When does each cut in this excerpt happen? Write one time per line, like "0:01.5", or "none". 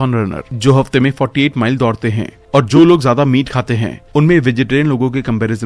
none